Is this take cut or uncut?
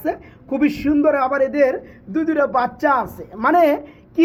uncut